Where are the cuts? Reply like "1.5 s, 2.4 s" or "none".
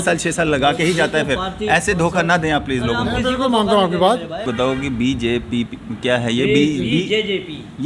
4.5 s